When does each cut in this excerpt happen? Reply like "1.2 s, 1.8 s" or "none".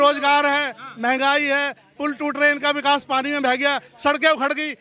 none